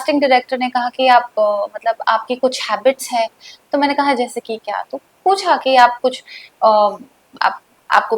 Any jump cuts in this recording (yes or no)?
no